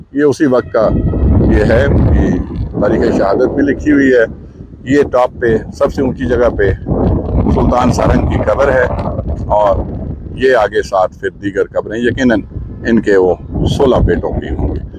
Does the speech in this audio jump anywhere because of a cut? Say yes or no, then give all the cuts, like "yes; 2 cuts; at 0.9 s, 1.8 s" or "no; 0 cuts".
no; 0 cuts